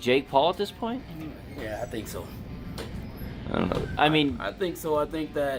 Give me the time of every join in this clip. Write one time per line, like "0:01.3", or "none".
none